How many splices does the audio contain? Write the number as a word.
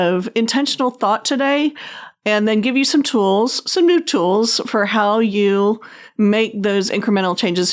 zero